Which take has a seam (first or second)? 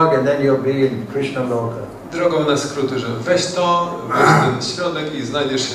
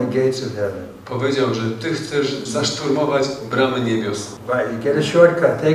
second